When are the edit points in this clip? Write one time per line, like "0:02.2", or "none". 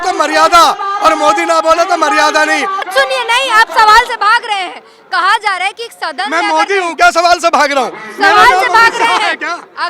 0:02.9